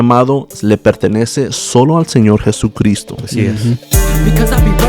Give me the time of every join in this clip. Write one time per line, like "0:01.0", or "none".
0:03.9